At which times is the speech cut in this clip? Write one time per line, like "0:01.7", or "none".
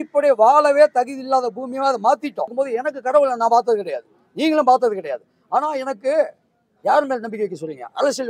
0:02.5